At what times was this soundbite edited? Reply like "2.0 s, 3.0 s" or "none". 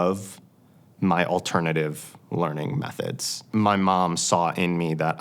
3.3 s

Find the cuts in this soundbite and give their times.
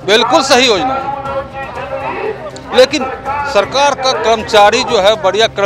none

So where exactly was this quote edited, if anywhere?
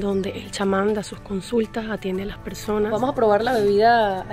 2.9 s

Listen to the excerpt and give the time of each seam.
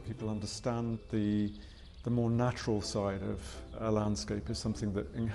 1.0 s, 3.8 s

